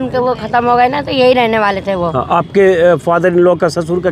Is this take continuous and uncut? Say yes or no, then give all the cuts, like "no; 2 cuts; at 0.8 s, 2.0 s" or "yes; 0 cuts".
yes; 0 cuts